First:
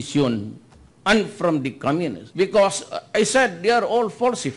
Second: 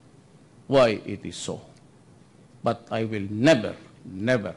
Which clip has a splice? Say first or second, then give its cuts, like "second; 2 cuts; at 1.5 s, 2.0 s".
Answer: first; 1 cut; at 2.2 s